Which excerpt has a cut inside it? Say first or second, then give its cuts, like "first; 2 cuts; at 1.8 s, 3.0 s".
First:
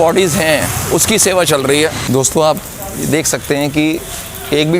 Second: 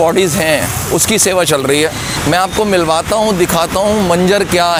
first; 1 cut; at 2.0 s